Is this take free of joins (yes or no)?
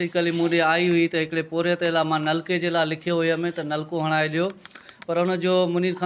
yes